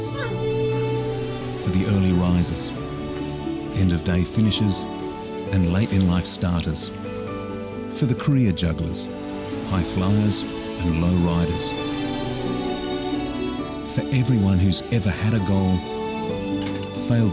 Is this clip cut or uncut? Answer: cut